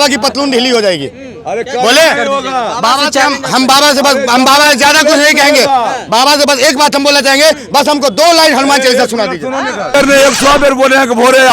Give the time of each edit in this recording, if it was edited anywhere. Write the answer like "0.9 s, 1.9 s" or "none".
9.9 s